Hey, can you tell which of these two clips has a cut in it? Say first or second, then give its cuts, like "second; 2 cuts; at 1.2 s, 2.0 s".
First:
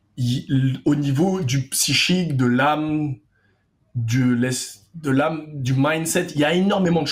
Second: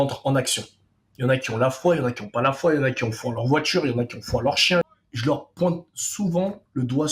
second; 1 cut; at 4.8 s